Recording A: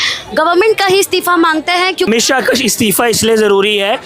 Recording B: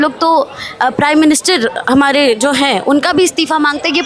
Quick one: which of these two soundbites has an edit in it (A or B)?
A